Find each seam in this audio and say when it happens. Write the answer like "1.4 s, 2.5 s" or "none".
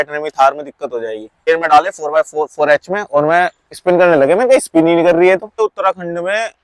1.4 s, 5.5 s

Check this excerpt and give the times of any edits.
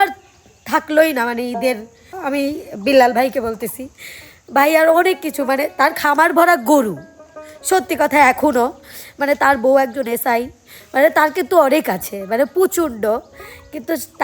2.2 s

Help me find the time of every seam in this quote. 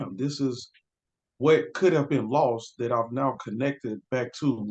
none

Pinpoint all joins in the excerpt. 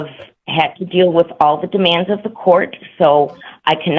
none

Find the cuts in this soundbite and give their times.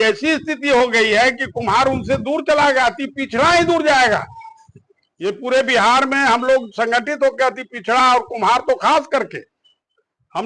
none

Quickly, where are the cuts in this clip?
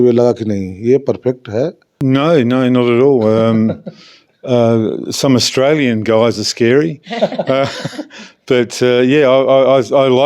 1.9 s

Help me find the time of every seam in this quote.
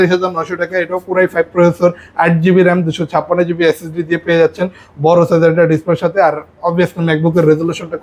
none

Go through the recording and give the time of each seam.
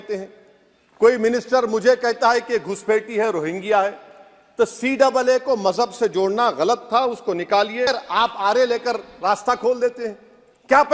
7.9 s

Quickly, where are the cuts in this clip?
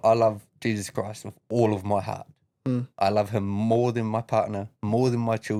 none

